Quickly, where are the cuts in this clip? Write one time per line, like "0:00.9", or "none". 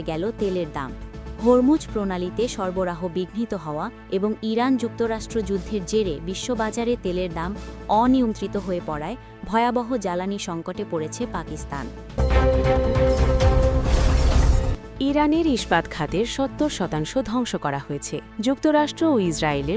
0:12.1
0:18.2